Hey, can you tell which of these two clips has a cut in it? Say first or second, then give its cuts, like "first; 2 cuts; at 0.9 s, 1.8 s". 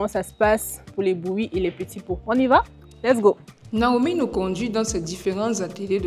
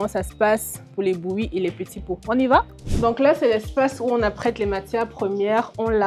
second; 1 cut; at 2.8 s